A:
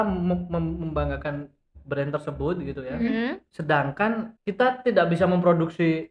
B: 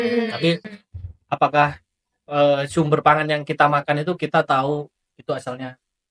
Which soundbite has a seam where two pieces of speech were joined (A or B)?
A